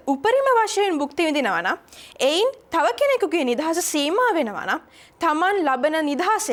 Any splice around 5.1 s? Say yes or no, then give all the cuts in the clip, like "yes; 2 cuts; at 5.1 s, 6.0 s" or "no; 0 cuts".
no; 0 cuts